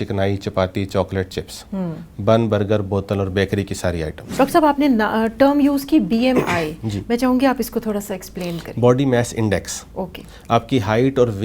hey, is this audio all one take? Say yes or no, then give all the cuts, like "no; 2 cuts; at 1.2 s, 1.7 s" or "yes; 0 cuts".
no; 1 cut; at 4.2 s